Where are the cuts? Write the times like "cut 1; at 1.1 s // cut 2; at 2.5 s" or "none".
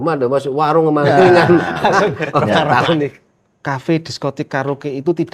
cut 1; at 3.1 s